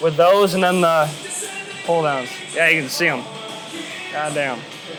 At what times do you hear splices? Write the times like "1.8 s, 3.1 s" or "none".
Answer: none